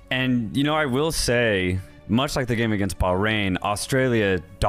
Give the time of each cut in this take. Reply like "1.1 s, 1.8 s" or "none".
none